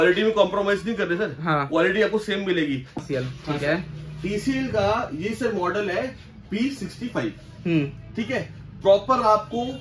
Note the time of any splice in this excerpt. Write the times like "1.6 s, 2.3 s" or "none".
3.0 s